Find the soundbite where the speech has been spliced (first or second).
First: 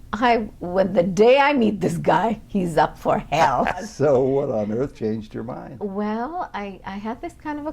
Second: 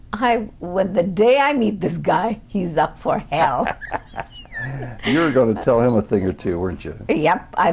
first